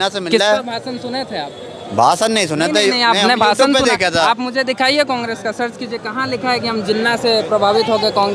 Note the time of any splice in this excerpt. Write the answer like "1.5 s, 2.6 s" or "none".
none